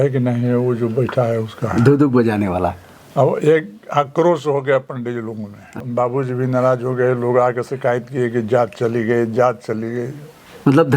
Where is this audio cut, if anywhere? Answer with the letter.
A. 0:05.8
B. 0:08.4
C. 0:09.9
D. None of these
A